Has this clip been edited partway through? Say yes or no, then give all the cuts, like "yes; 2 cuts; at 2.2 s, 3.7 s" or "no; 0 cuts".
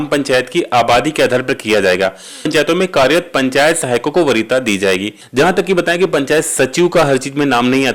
yes; 2 cuts; at 2.5 s, 5.2 s